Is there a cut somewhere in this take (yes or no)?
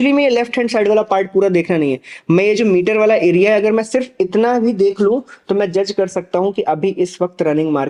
no